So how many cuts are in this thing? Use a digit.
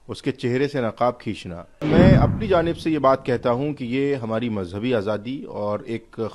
1